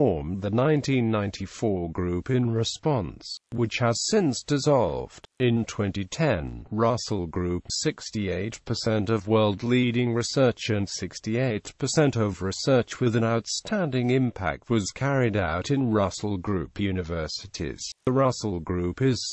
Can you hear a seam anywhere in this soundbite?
no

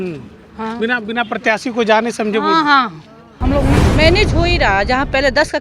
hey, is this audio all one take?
no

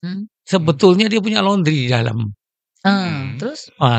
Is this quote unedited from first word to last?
yes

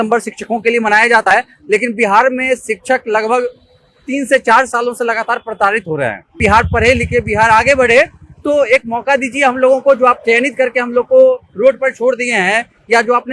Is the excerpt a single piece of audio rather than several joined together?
no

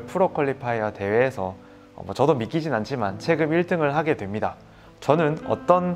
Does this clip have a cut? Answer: no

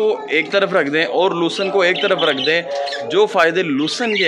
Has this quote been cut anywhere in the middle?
no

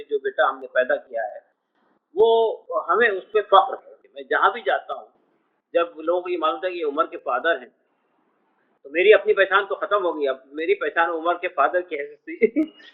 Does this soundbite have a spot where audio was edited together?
yes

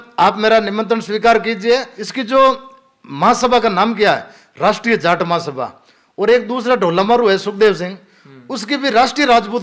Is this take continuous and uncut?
no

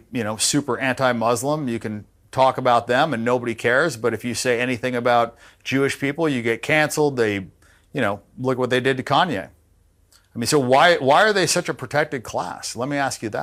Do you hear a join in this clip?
no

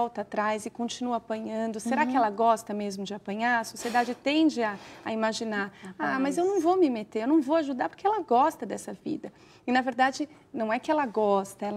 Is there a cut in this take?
no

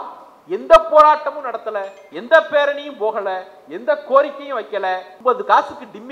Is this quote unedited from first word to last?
no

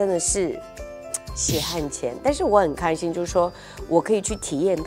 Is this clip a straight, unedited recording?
yes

